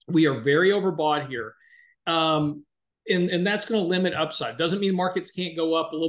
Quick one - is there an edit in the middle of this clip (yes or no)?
no